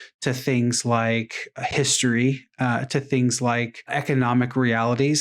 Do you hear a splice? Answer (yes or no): yes